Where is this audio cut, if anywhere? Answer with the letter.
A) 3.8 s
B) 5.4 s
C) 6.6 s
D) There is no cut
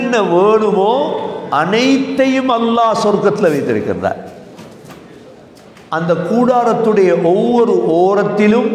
B